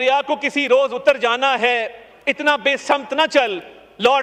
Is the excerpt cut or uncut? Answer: uncut